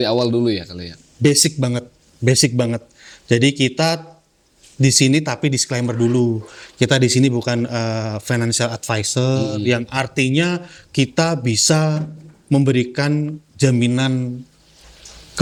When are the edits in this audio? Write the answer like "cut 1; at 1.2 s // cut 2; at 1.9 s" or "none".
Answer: none